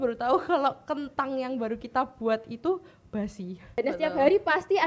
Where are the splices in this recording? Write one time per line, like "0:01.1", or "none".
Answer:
0:03.8